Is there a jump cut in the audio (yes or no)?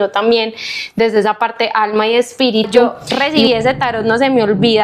yes